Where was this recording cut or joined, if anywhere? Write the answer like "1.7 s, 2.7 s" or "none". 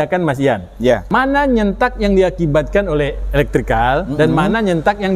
1.0 s

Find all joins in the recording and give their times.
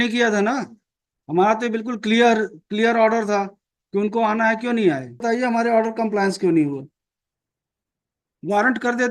5.2 s

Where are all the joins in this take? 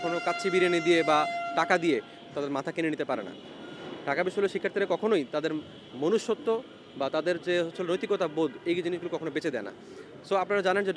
none

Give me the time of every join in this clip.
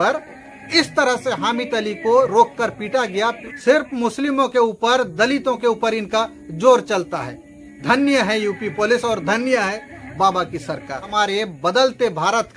3.4 s, 11.1 s

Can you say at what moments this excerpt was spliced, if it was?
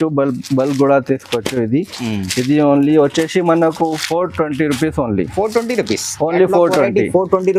none

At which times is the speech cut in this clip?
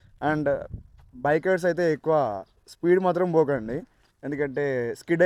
none

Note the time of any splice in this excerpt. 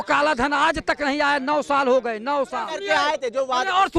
2.7 s

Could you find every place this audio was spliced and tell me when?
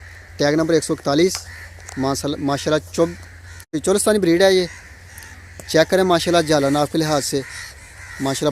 3.8 s

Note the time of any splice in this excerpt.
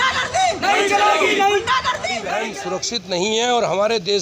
2.4 s

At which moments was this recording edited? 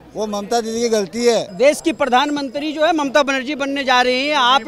1.5 s

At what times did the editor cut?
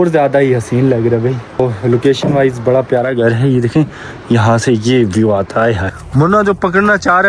1.6 s, 5.9 s

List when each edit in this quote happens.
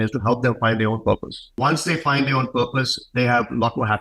none

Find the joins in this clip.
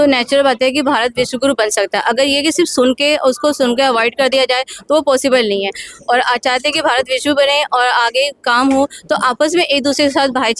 none

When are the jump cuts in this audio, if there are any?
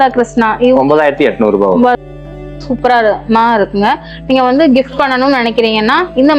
2.0 s

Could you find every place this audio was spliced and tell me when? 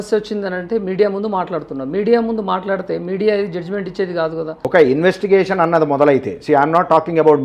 4.6 s

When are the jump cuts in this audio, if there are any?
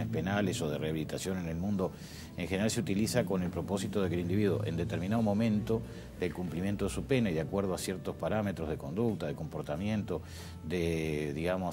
none

